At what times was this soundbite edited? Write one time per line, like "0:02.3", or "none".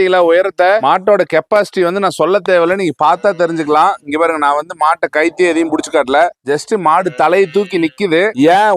none